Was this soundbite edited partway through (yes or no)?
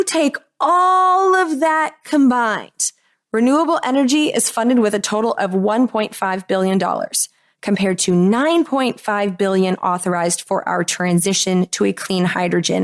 no